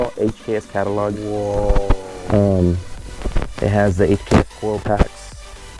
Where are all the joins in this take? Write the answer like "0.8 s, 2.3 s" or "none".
none